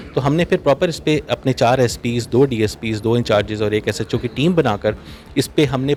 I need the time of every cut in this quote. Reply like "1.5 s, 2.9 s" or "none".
none